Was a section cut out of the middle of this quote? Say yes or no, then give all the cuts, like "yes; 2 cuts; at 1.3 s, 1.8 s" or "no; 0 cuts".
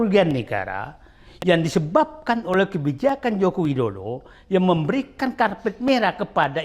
no; 0 cuts